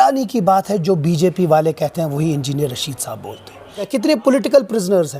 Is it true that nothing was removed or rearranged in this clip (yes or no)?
no